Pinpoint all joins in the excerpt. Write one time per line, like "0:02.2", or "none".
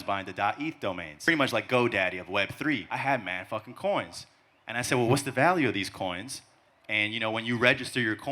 0:01.3
0:02.9